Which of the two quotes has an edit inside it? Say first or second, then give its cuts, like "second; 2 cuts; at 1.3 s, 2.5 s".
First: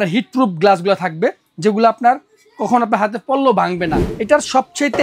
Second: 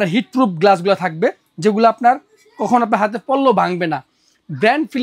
first; 1 cut; at 4.1 s